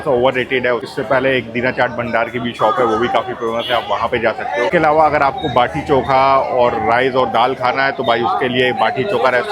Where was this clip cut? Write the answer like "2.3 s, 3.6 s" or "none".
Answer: 4.7 s